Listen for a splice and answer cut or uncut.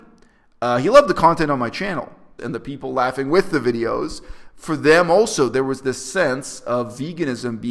cut